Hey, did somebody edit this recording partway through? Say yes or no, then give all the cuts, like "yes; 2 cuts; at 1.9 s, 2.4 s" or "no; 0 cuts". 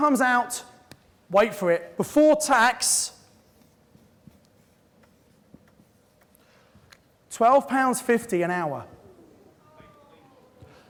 no; 0 cuts